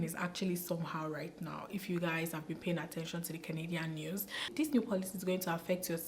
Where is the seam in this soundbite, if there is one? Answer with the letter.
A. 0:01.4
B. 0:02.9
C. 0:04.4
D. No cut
C